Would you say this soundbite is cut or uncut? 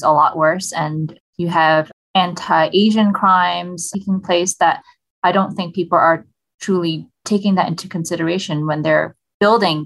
uncut